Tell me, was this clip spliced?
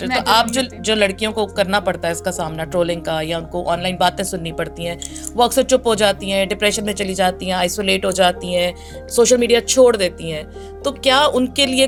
no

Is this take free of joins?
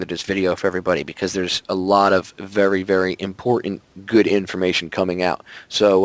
yes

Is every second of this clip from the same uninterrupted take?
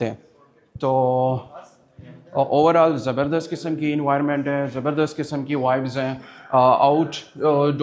yes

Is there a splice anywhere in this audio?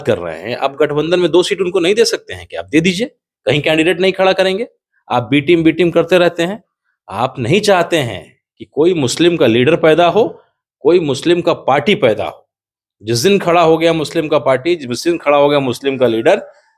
no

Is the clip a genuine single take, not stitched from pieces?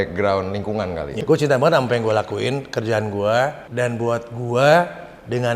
no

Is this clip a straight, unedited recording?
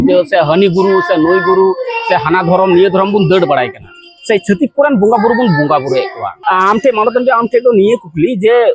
no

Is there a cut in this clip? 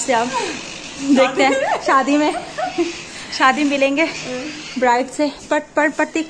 no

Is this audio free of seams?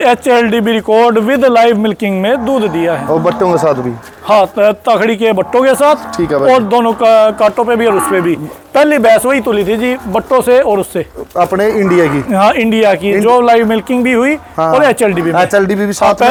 yes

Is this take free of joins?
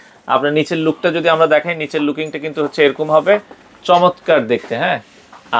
yes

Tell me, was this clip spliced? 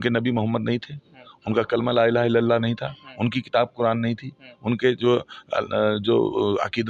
no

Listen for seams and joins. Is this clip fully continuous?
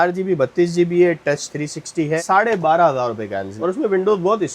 no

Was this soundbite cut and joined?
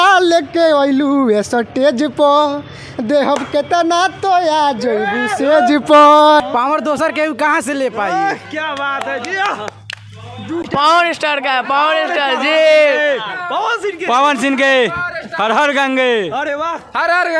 yes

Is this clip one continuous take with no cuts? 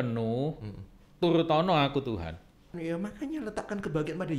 no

